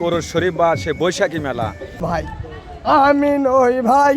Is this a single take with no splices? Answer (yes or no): no